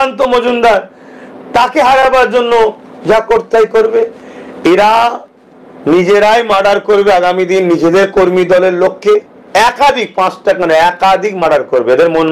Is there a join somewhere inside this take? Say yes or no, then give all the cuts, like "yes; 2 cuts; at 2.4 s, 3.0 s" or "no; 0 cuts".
no; 0 cuts